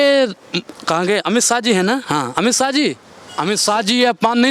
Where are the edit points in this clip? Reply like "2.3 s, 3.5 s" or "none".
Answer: none